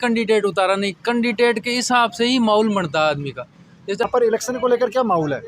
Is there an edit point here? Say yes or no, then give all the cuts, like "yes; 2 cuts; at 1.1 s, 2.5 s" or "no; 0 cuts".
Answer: yes; 1 cut; at 4.0 s